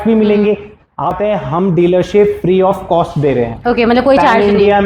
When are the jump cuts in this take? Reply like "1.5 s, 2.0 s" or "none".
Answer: 1.2 s